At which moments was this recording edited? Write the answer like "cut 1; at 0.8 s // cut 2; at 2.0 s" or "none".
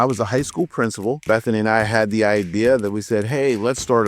cut 1; at 1.2 s